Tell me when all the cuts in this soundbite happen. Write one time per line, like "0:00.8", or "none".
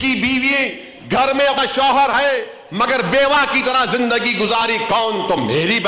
0:01.6